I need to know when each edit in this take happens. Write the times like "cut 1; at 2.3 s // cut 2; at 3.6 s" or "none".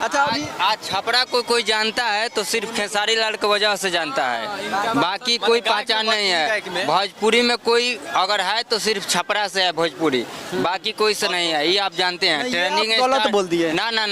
none